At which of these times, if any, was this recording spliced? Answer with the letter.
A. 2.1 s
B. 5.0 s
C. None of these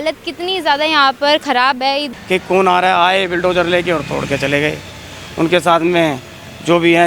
A